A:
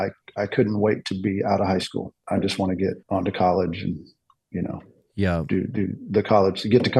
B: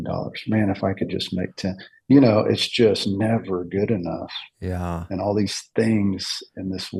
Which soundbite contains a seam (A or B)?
A